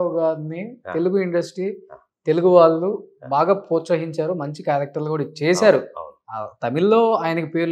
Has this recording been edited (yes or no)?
no